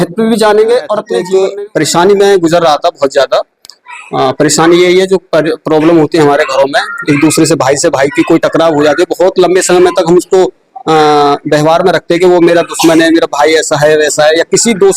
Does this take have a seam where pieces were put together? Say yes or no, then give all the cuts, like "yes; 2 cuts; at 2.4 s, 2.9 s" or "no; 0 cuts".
yes; 1 cut; at 1.2 s